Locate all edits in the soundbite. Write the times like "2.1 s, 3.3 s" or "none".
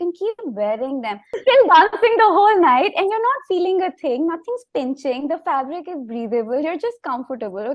1.3 s